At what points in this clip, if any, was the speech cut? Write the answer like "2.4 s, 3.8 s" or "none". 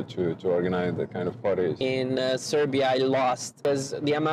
1.8 s, 3.5 s

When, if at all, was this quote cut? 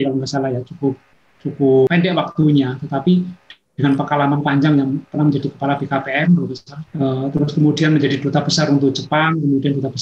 1.9 s, 6.8 s

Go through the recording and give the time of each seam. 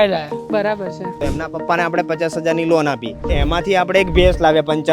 1.2 s, 3.3 s

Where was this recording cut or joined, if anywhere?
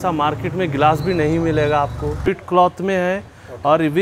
2.3 s

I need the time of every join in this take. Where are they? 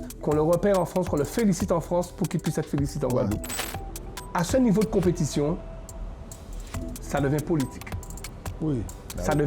3.5 s

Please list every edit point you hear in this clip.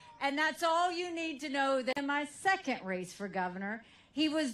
none

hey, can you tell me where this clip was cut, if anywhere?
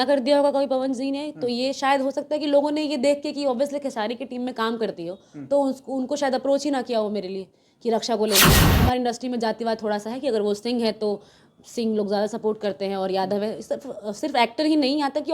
8.5 s

